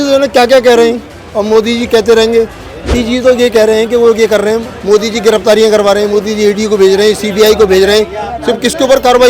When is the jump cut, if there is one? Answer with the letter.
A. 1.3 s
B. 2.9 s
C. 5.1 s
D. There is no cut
B